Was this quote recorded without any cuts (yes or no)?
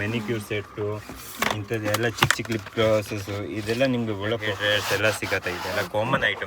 no